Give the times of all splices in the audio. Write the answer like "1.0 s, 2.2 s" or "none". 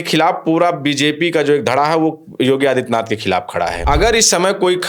3.8 s

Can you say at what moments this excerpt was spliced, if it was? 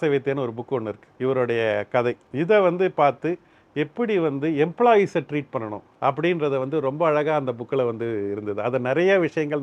1.0 s, 2.2 s, 5.8 s

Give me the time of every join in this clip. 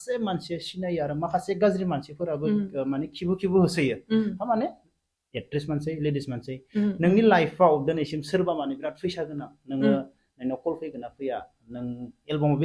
none

